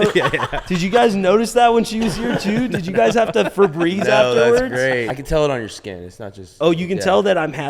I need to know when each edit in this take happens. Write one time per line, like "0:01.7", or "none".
0:05.1

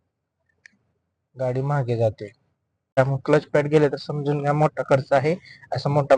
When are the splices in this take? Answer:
0:03.0

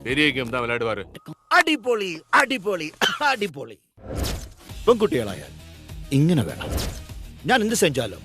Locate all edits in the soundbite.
0:01.3

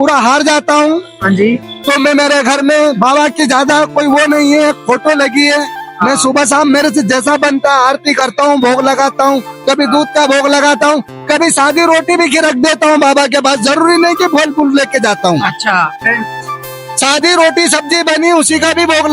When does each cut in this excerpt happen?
none

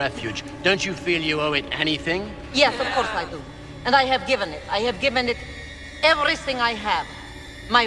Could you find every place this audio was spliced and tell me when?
none

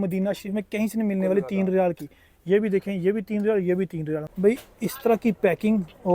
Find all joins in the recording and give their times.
0:04.3

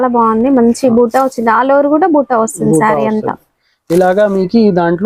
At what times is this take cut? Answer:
none

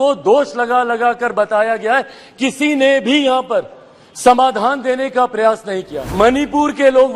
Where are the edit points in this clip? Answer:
0:06.0

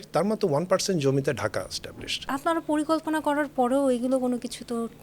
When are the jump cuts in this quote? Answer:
0:02.2

